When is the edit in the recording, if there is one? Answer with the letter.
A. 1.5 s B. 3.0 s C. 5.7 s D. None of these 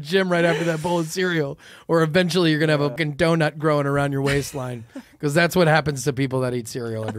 B